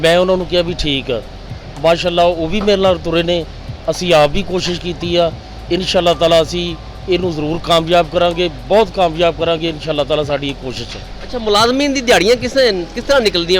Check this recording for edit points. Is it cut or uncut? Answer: uncut